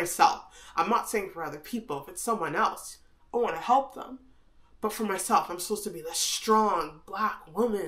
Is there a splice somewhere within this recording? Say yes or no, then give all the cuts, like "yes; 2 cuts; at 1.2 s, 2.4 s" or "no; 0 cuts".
no; 0 cuts